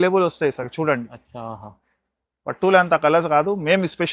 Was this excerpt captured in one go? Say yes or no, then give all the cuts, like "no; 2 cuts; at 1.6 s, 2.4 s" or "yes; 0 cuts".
yes; 0 cuts